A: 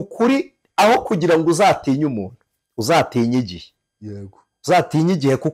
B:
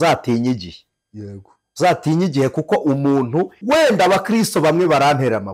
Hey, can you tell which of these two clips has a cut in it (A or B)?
B